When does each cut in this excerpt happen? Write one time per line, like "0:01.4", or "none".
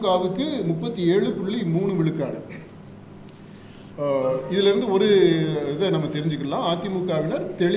none